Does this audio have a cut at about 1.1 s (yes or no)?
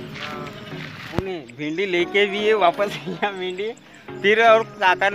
yes